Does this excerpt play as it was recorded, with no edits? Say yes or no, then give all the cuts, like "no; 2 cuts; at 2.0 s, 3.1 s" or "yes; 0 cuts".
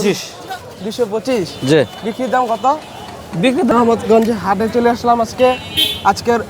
no; 1 cut; at 3.7 s